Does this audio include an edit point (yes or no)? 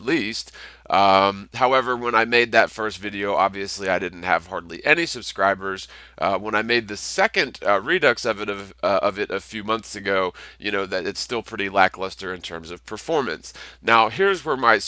no